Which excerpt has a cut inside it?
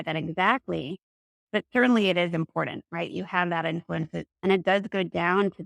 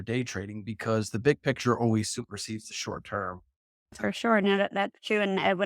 second; 1 cut; at 4.0 s

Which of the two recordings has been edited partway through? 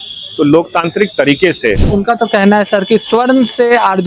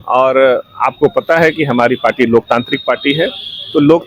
first; 1 cut; at 1.8 s

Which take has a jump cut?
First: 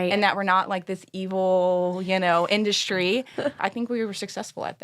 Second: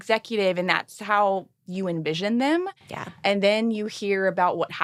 first; 1 cut; at 3.6 s

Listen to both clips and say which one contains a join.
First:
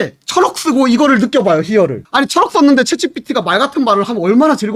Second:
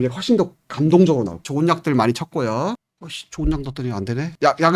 second; 1 cut; at 1.5 s

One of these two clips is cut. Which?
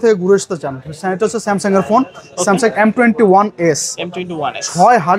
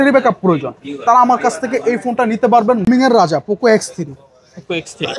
second; 1 cut; at 2.9 s

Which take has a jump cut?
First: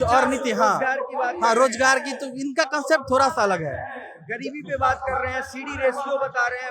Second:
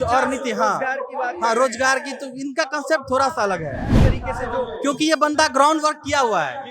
second; 1 cut; at 3.9 s

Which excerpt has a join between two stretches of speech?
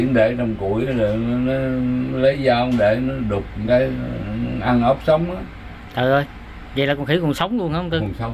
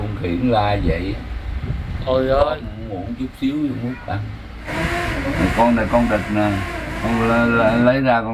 second; 1 cut; at 4.6 s

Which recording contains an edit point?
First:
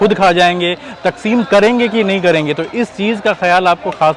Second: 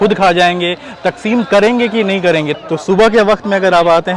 second; 1 cut; at 2.6 s

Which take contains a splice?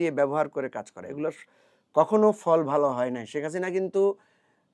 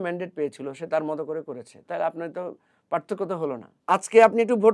second; 1 cut; at 3.7 s

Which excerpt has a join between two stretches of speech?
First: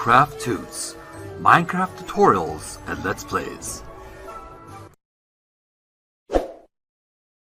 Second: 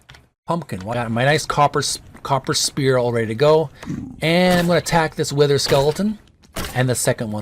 second; 1 cut; at 0.9 s

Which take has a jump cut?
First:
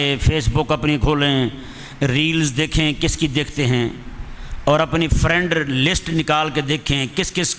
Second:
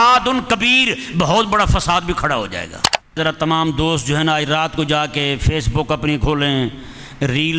second; 1 cut; at 3.2 s

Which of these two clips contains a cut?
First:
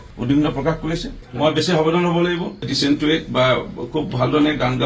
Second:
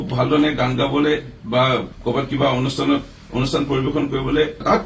first; 1 cut; at 1.2 s

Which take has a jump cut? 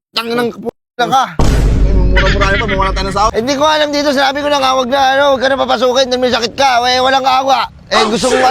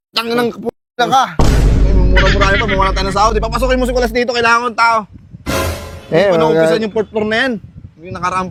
first; 1 cut; at 3.3 s

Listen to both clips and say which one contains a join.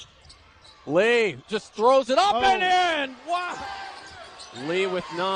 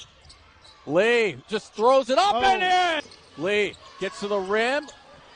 second; 1 cut; at 3.0 s

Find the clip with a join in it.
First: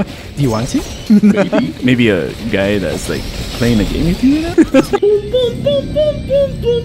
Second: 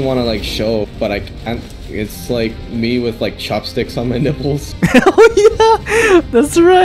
first; 3 cuts; at 0.9 s, 1.8 s, 4.7 s

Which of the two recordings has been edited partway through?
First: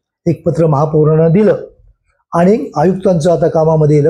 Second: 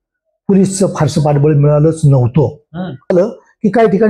second; 1 cut; at 3.1 s

